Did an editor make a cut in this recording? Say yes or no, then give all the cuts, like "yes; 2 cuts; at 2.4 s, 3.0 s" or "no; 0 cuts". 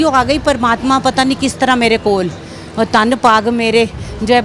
no; 0 cuts